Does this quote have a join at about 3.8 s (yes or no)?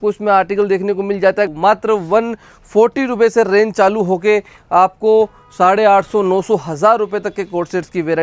no